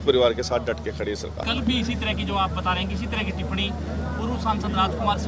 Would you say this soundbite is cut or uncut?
cut